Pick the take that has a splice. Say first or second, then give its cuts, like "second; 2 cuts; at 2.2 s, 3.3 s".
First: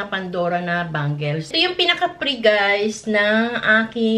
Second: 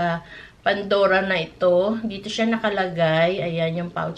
first; 1 cut; at 1.5 s